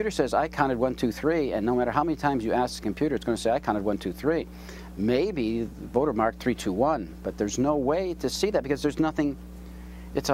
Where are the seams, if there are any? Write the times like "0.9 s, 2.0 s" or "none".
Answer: none